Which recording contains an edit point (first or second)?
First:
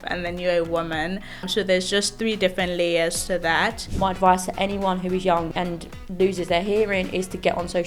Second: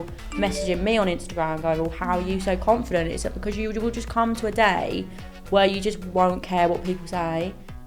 first